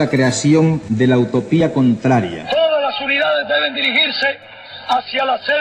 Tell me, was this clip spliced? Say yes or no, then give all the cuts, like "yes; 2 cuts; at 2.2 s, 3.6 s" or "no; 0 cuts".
yes; 2 cuts; at 0.8 s, 2.4 s